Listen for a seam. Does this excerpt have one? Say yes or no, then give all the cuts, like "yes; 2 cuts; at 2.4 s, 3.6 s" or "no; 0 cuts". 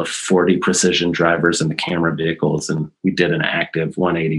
yes; 1 cut; at 2.9 s